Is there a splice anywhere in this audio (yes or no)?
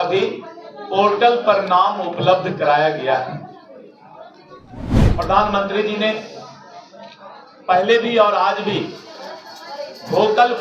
no